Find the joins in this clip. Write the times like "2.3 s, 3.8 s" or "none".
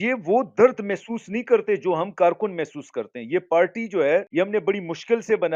4.3 s